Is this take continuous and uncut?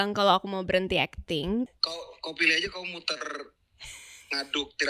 no; 1 cut; at 1.7 s

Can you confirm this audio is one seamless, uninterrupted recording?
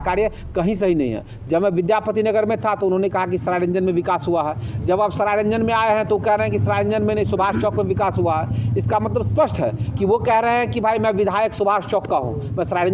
yes; 0 cuts

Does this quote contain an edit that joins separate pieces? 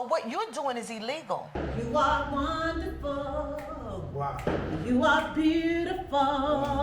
yes; 1 cut; at 1.6 s

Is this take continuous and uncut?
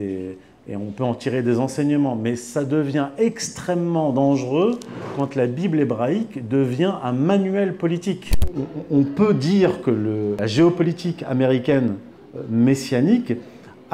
no; 2 cuts; at 8.4 s, 10.4 s

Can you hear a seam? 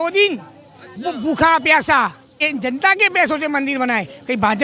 yes; 1 cut; at 2.3 s

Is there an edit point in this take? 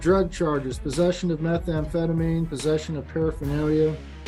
no; 0 cuts

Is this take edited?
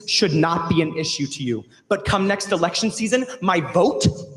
no; 0 cuts

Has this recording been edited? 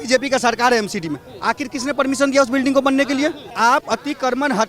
yes; 1 cut; at 3.4 s

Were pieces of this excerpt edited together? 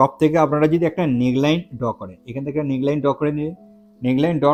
no; 0 cuts

